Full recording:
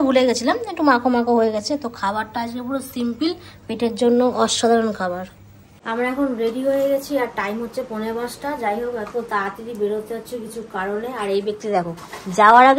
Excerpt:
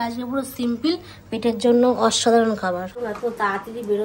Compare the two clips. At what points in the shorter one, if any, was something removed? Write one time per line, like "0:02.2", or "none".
0:03.0